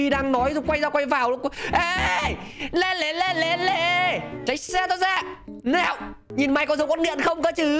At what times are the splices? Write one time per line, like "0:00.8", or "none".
0:04.4
0:06.1